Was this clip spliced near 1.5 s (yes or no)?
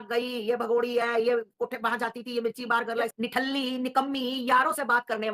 no